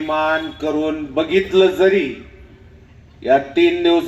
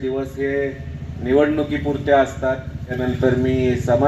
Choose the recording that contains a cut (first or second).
second